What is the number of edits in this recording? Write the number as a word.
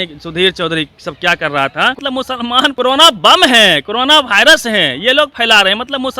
one